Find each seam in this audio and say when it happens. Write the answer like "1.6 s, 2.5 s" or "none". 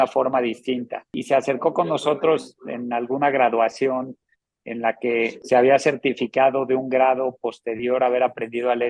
1.2 s, 5.4 s